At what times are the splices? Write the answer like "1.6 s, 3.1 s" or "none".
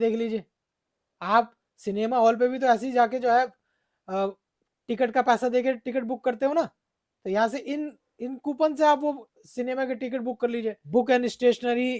10.8 s